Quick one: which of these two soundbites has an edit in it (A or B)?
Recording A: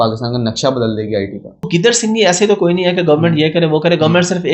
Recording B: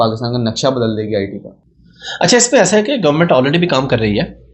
A